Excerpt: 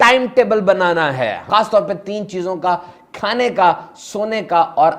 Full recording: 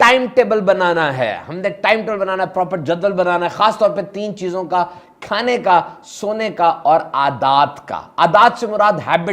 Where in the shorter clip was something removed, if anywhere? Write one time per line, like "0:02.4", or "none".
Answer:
0:01.4